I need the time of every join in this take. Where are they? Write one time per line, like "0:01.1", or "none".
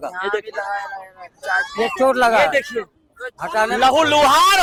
none